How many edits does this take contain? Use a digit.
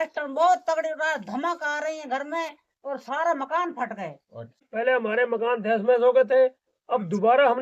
1